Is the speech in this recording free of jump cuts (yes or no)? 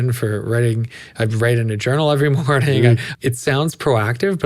no